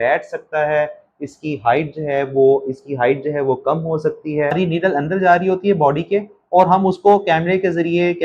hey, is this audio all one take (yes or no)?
no